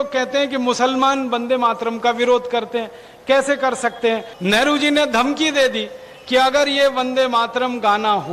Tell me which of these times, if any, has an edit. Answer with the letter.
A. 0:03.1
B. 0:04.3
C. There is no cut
B